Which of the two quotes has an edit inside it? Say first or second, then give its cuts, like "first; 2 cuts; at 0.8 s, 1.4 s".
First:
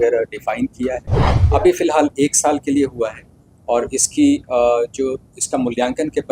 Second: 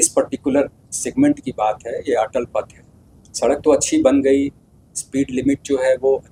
first; 1 cut; at 1.3 s